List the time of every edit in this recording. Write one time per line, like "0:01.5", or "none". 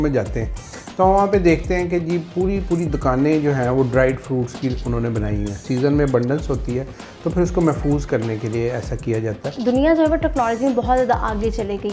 0:05.6
0:09.6